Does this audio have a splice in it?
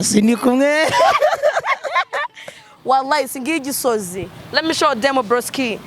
yes; 1 cut; at 2.8 s

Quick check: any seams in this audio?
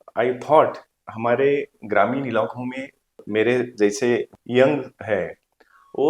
yes; 3 cuts; at 1.1 s, 3.2 s, 4.4 s

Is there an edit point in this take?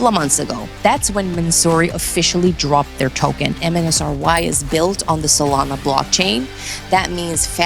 yes; 1 cut; at 3.6 s

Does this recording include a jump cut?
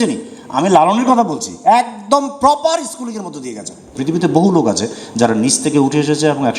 yes; 1 cut; at 3.9 s

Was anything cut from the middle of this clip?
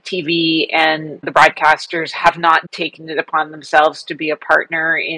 yes; 2 cuts; at 1.3 s, 2.7 s

